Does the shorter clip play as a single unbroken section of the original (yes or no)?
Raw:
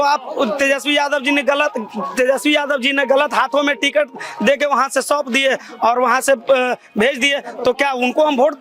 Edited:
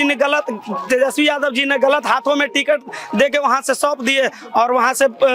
yes